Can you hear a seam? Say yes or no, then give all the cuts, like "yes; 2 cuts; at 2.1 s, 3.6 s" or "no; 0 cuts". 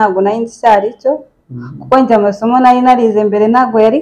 no; 0 cuts